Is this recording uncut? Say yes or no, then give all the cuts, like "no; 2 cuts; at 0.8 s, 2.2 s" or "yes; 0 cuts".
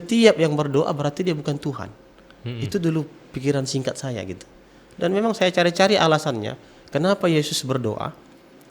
yes; 0 cuts